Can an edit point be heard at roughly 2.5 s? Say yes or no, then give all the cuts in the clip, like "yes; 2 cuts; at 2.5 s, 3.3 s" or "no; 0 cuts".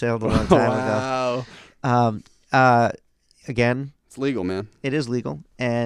no; 0 cuts